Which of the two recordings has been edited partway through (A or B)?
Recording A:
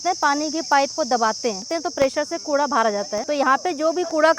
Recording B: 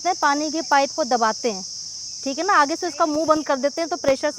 A